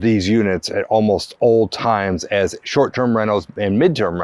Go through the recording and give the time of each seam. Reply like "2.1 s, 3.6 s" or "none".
none